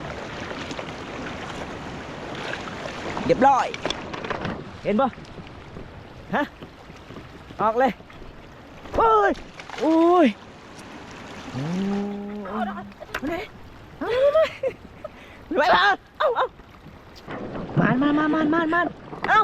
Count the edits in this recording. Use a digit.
1